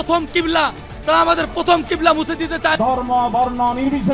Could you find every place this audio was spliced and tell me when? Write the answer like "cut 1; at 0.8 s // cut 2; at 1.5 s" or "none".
cut 1; at 2.8 s